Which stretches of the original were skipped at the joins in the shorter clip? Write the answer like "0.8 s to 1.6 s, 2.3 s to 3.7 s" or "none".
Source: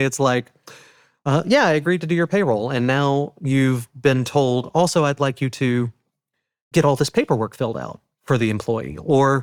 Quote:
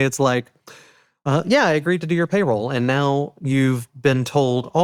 none